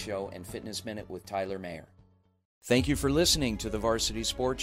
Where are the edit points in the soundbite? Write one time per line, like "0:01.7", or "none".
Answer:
0:02.7